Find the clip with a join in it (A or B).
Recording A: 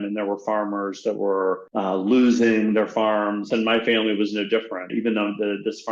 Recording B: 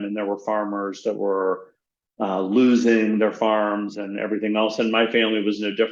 A